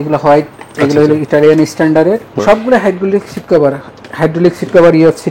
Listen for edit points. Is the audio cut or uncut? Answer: cut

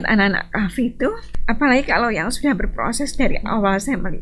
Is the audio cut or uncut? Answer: cut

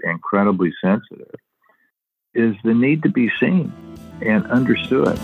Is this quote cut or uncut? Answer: cut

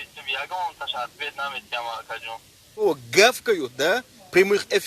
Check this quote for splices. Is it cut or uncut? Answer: cut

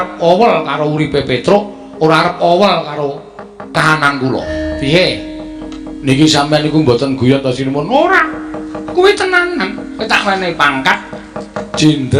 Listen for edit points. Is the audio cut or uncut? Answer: cut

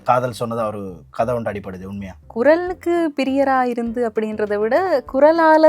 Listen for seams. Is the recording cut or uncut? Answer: uncut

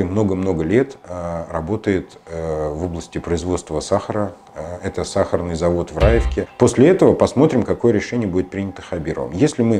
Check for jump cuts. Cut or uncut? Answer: cut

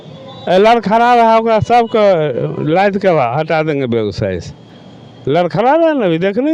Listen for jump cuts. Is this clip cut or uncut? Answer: uncut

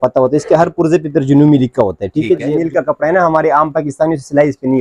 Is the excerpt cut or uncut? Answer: cut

